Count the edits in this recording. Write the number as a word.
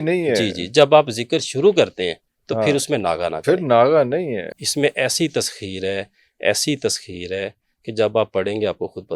one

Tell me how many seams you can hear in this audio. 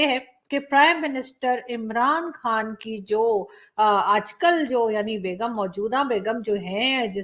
zero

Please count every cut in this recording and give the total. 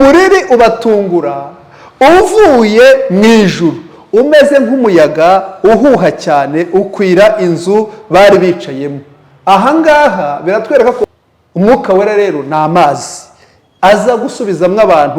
one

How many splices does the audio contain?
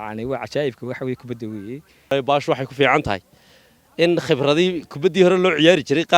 one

